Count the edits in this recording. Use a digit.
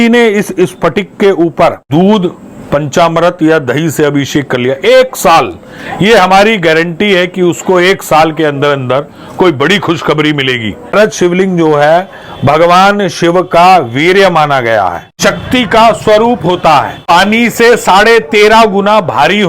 4